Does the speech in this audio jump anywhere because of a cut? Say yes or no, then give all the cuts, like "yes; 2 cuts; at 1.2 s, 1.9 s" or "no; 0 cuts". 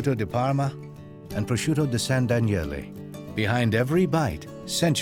no; 0 cuts